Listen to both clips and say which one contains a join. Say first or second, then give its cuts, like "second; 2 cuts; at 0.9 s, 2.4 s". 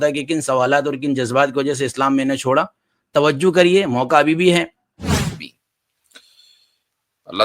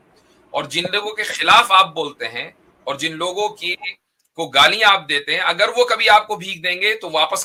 first; 1 cut; at 5.2 s